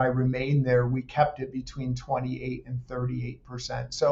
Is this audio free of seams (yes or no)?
yes